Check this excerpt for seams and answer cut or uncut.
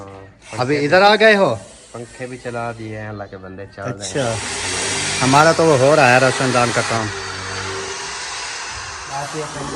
uncut